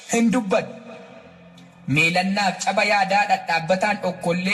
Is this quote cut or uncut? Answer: uncut